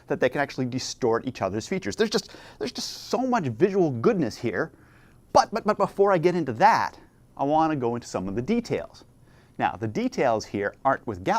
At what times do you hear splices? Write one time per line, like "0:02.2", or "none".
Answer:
0:02.8